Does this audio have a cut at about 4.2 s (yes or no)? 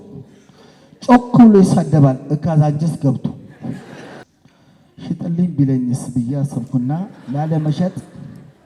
yes